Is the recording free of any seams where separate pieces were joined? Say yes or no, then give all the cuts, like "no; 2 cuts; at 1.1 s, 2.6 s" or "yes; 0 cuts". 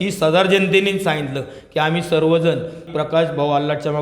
no; 1 cut; at 2.9 s